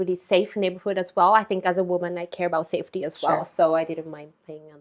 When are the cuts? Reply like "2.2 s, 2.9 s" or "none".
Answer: none